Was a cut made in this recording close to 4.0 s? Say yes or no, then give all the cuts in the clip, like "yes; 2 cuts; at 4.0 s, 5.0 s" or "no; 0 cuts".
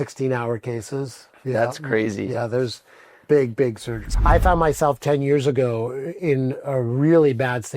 yes; 1 cut; at 4.0 s